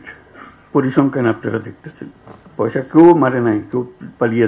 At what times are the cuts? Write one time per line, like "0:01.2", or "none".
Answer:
none

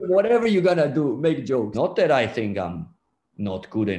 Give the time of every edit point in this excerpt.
0:01.7

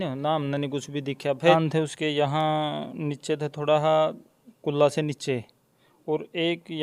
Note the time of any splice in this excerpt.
0:01.5

